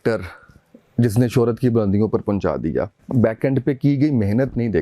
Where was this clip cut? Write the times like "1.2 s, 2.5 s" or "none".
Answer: 3.0 s

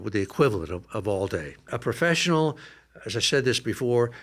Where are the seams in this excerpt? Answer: 1.7 s

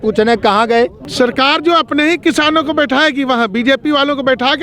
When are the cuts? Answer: 1.0 s

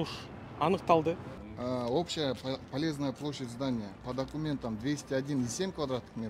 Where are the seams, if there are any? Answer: 1.3 s

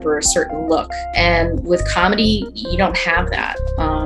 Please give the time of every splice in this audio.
1.1 s

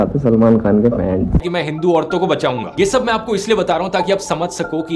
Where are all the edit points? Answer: 1.5 s

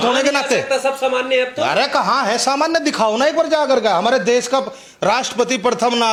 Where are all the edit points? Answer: none

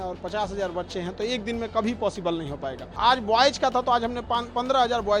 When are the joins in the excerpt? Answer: 3.0 s

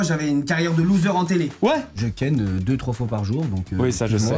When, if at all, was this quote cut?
1.9 s

